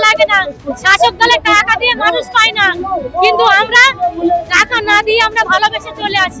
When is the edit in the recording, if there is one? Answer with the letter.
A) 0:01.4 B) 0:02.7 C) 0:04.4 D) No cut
D